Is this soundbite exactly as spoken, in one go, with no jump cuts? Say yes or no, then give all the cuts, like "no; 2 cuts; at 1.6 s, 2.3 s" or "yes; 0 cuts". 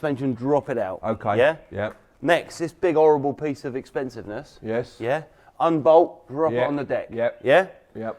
yes; 0 cuts